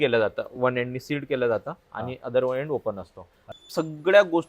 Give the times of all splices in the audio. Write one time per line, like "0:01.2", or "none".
0:03.4